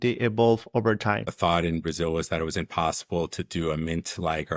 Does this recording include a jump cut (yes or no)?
yes